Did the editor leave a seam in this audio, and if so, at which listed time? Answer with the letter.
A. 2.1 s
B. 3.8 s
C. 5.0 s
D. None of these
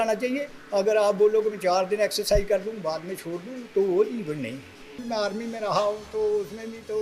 C